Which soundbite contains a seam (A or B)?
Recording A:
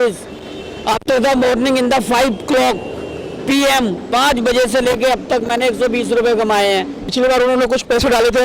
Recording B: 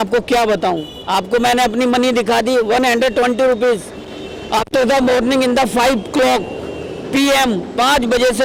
A